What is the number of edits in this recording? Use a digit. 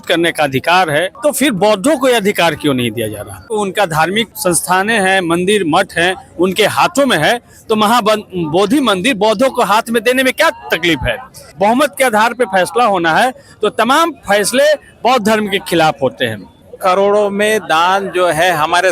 5